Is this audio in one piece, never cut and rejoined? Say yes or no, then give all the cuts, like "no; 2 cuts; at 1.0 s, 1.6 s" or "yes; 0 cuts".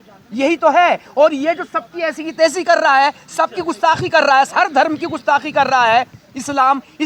yes; 0 cuts